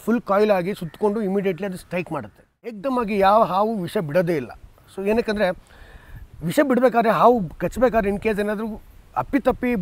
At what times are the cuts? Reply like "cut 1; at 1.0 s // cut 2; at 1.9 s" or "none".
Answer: cut 1; at 2.8 s